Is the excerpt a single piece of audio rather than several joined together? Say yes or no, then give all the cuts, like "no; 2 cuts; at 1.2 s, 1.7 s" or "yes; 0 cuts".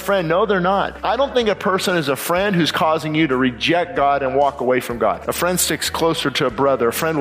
no; 2 cuts; at 0.9 s, 5.2 s